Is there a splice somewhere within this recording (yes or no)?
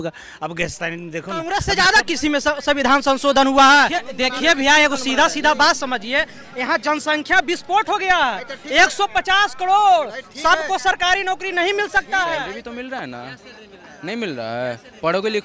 yes